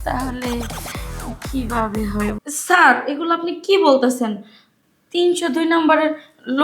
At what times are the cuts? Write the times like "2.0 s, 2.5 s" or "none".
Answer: 2.5 s